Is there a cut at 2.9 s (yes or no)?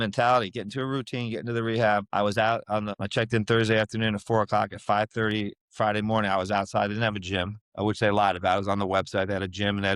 yes